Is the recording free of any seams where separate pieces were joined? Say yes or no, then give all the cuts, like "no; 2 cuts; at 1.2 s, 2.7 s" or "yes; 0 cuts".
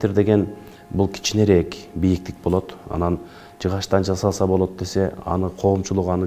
yes; 0 cuts